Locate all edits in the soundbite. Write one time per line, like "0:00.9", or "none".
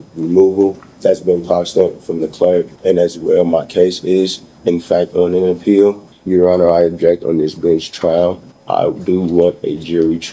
0:00.9
0:02.7
0:06.1
0:08.5